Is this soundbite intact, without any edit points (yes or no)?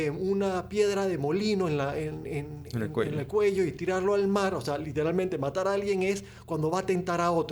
yes